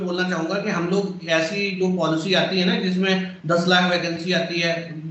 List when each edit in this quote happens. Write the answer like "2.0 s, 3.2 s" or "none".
none